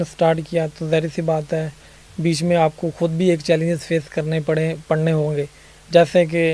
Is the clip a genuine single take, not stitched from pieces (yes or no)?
yes